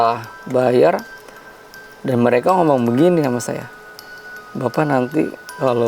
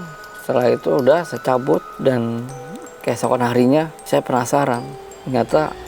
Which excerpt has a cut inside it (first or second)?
second